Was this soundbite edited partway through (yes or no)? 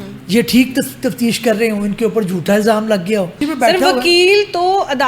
yes